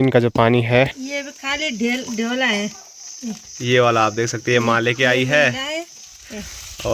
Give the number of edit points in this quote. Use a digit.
1